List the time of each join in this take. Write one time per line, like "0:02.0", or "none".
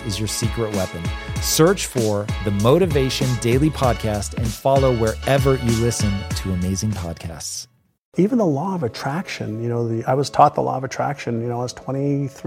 0:08.1